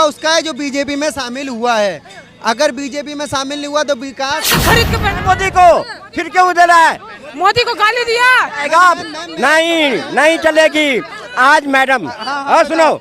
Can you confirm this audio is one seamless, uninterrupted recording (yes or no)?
no